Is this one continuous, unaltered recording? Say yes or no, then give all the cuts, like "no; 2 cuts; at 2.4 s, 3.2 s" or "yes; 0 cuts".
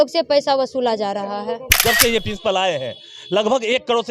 no; 1 cut; at 1.8 s